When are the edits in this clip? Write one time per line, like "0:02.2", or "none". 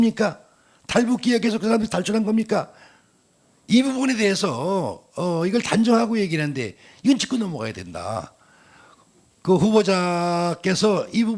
none